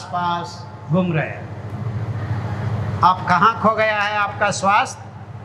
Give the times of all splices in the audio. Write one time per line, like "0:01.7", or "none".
none